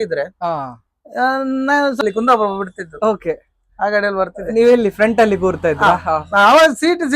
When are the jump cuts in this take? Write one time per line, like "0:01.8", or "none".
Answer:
0:02.0

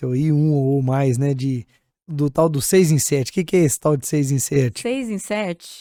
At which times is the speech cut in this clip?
none

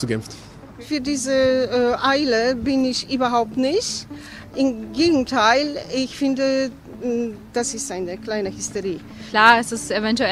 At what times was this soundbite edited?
0:00.8
0:09.2

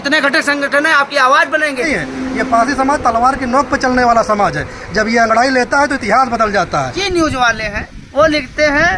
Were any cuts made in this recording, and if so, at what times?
0:01.9
0:07.0

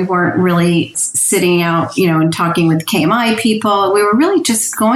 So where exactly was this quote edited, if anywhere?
0:00.9

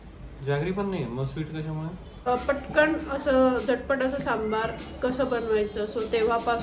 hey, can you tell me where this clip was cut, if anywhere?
0:02.3

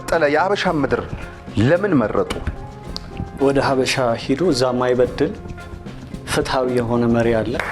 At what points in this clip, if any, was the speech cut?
none

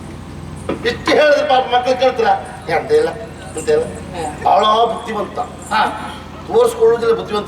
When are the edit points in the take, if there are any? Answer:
0:04.3

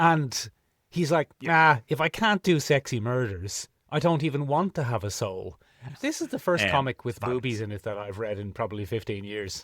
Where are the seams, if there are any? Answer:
0:05.9

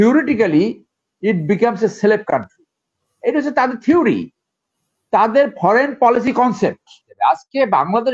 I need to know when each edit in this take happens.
0:07.1

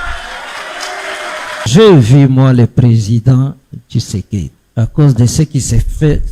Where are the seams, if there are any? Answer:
0:01.7
0:04.6

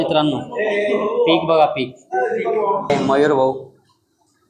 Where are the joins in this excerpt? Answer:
0:02.9

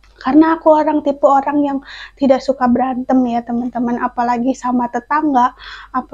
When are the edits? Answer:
none

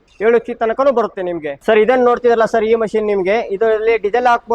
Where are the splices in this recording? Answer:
0:01.6

